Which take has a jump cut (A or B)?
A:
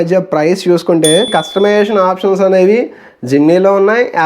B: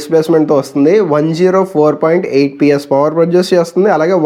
A